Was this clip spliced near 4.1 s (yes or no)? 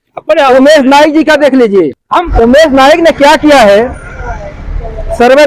no